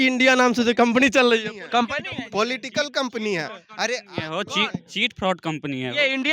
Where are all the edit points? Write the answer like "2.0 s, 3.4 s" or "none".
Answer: none